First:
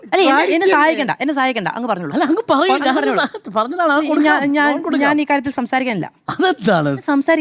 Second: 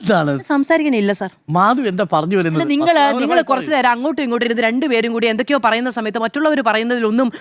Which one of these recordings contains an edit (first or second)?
second